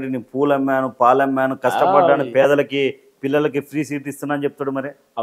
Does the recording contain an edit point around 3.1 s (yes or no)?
no